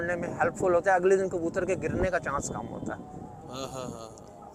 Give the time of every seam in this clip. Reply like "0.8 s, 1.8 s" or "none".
none